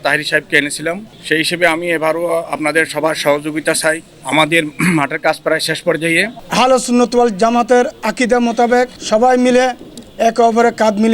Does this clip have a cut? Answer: yes; 3 cuts; at 1.1 s, 4.1 s, 6.4 s

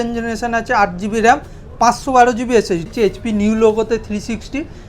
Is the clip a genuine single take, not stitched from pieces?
no; 1 cut; at 2.8 s

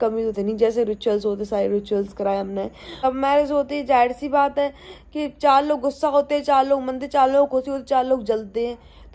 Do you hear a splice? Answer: yes; 1 cut; at 3.0 s

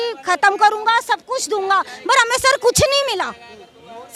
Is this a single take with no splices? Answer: yes; 0 cuts

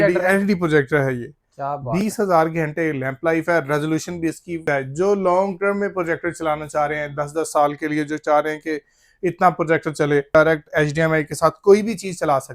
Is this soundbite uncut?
no; 2 cuts; at 4.6 s, 10.3 s

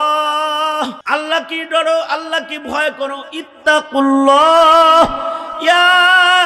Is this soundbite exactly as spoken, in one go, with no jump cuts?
no; 1 cut; at 1.0 s

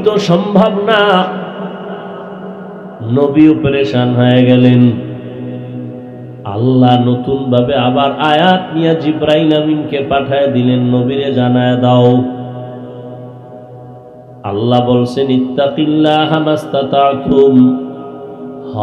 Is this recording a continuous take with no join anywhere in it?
yes; 0 cuts

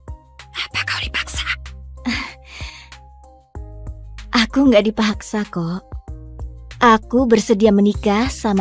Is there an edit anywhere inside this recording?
no; 0 cuts

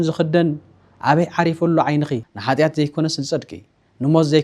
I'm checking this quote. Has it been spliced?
yes; 1 cut; at 2.3 s

